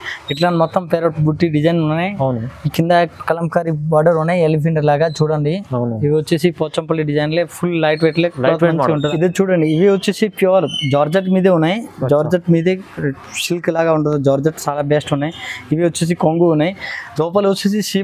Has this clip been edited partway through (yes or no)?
yes